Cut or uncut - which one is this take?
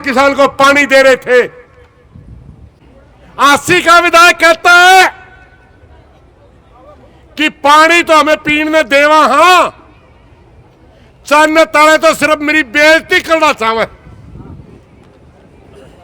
cut